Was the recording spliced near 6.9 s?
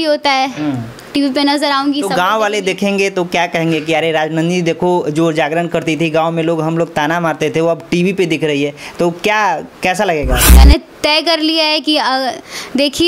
no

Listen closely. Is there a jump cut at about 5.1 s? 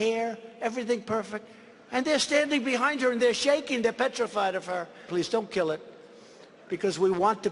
yes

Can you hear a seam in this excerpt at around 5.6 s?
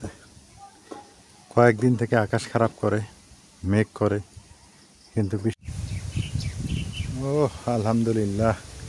yes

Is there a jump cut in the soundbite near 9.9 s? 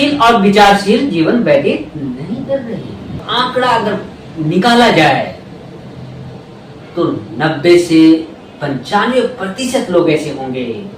no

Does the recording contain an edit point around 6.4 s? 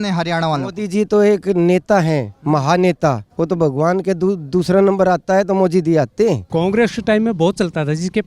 yes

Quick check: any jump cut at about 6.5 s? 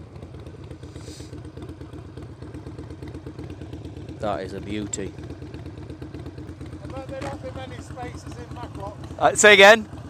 yes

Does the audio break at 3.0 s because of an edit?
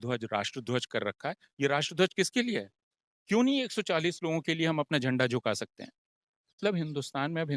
no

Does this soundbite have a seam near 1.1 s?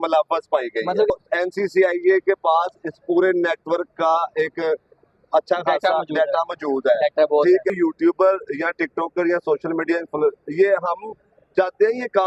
yes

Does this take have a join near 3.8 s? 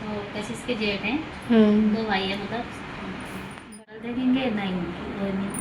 yes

